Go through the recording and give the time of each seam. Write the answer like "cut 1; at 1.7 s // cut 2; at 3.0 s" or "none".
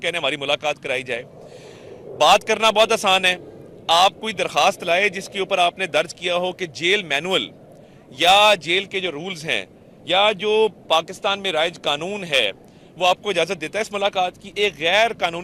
none